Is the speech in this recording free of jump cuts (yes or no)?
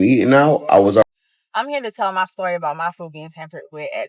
no